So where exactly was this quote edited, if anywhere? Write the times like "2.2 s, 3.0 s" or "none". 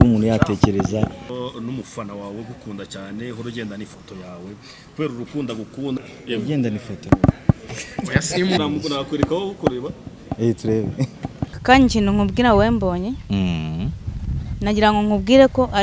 1.3 s, 6.0 s, 6.9 s, 8.6 s, 11.5 s